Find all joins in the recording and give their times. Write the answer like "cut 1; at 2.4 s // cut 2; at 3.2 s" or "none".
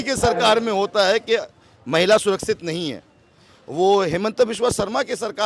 none